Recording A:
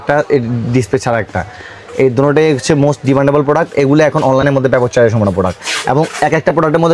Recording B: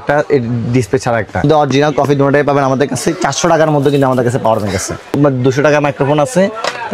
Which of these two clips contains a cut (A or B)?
B